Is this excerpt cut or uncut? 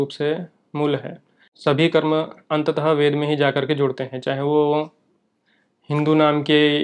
cut